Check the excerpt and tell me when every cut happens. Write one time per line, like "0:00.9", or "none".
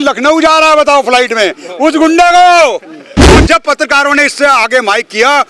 0:03.4